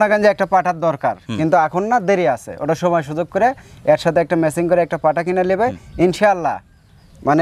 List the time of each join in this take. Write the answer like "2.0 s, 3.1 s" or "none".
none